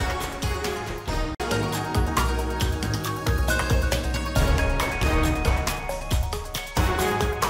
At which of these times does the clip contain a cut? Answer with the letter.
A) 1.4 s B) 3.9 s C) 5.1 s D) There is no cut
A